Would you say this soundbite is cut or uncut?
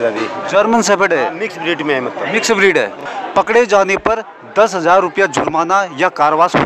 cut